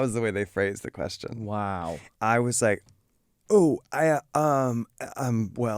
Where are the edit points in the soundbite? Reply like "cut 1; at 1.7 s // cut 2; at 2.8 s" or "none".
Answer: cut 1; at 2.1 s